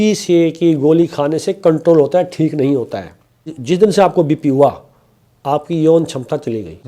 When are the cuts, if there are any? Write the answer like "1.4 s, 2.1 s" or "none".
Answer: 3.6 s